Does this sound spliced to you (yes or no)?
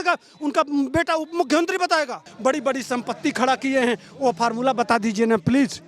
yes